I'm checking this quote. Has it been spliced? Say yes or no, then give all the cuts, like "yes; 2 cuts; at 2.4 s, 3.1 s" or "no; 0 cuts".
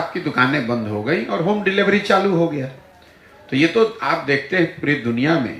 no; 0 cuts